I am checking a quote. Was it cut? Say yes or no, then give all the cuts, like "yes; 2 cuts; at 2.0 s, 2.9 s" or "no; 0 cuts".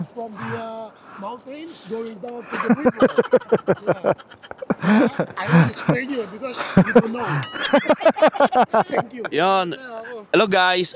yes; 1 cut; at 9.2 s